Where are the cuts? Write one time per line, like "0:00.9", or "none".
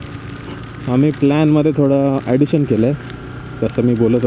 none